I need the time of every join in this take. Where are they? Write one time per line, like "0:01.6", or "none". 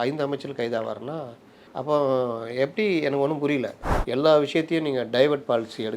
0:03.8